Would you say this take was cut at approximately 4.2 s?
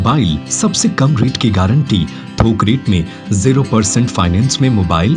no; 0 cuts

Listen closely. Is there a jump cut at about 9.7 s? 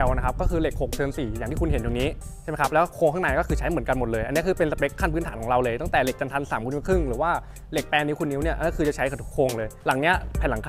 yes; 1 cut; at 9.7 s

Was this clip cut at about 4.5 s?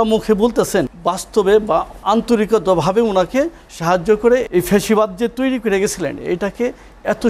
yes; 3 cuts; at 0.9 s, 1.9 s, 4.5 s

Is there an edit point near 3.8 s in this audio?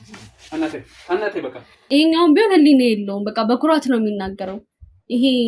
no; 1 cut; at 1.7 s

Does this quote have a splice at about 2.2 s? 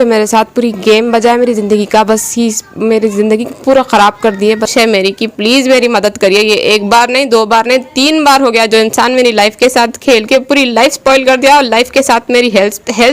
no; 1 cut; at 4.7 s

